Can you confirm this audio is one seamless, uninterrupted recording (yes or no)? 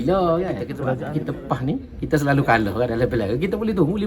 no